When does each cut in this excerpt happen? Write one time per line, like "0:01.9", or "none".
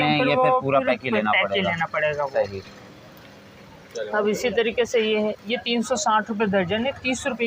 none